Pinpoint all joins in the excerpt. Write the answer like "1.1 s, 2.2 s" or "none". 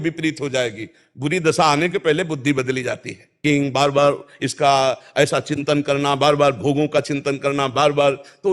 3.4 s